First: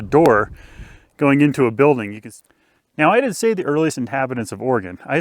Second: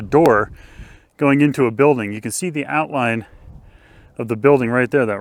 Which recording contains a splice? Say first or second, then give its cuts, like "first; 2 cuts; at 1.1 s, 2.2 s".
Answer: first; 1 cut; at 2.3 s